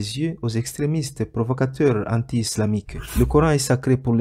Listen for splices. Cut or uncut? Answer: cut